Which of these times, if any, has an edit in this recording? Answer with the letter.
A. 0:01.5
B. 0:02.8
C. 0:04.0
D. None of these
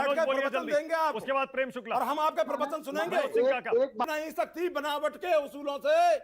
C